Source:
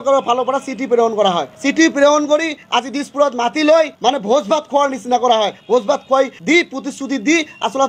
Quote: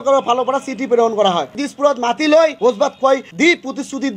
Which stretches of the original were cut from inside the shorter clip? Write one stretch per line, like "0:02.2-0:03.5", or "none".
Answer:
0:01.5-0:02.9
0:03.9-0:05.6